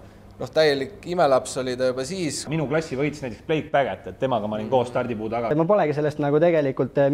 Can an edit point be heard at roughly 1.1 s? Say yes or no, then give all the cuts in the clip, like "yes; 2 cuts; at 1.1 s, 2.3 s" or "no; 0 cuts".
no; 2 cuts; at 2.5 s, 5.5 s